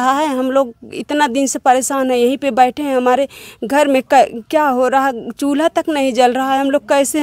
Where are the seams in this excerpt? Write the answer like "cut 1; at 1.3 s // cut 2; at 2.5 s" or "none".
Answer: none